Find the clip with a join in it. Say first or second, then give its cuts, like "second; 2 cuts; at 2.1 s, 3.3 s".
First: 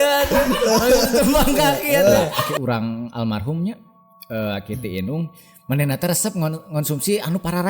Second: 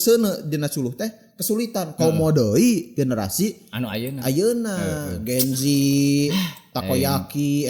first; 1 cut; at 2.5 s